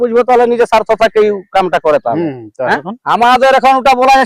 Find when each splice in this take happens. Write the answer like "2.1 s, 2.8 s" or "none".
2.9 s